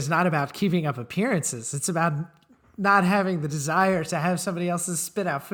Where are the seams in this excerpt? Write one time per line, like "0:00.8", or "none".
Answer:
none